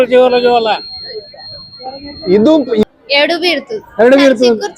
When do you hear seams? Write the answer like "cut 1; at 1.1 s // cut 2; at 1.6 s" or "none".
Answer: cut 1; at 1.7 s // cut 2; at 2.8 s